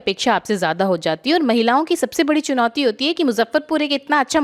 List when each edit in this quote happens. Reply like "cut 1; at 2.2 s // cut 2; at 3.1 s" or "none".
none